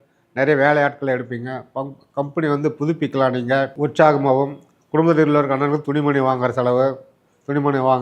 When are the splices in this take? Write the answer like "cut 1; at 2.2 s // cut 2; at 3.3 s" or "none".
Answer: cut 1; at 3.7 s